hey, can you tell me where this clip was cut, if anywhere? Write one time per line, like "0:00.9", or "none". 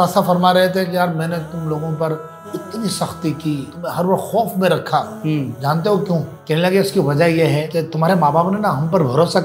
0:03.7
0:05.5
0:06.3
0:07.7